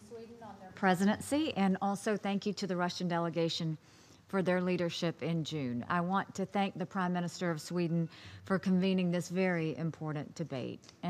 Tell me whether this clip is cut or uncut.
uncut